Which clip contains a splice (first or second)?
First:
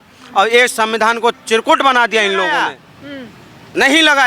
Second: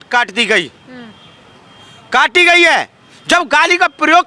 first